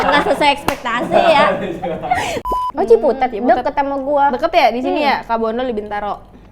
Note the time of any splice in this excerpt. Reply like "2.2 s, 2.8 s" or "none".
2.4 s